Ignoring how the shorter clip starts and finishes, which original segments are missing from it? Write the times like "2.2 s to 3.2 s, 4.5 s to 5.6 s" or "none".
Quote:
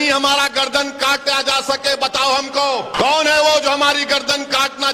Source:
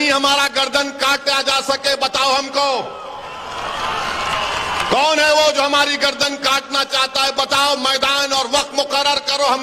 2.9 s to 4.8 s